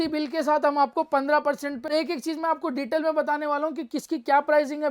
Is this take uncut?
no; 1 cut; at 1.9 s

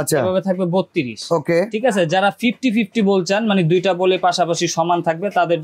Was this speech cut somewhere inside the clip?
no; 0 cuts

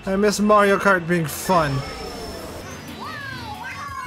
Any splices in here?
yes; 1 cut; at 2.6 s

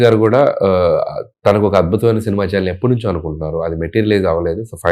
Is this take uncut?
yes; 0 cuts

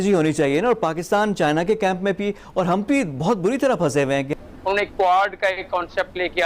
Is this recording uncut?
no; 1 cut; at 4.4 s

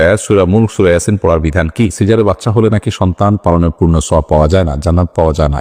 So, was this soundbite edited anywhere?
yes; 1 cut; at 1.9 s

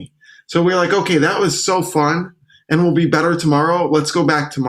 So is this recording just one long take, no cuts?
yes; 0 cuts

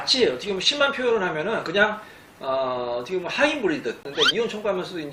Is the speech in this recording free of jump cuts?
no; 1 cut; at 4.1 s

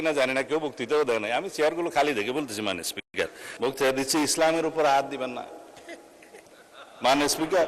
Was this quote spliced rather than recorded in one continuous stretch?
yes; 1 cut; at 3.4 s

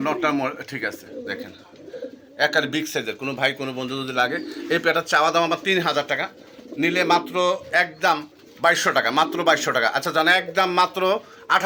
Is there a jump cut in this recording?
no; 0 cuts

